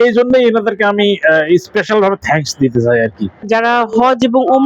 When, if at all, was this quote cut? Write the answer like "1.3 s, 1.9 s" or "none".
3.5 s